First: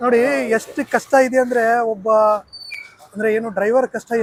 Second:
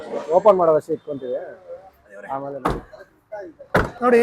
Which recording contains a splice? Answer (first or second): second